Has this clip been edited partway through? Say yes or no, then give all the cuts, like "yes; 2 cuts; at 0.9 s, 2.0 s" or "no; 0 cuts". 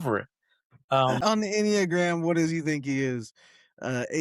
yes; 1 cut; at 1.2 s